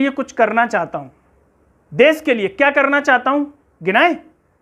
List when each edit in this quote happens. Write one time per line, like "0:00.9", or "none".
none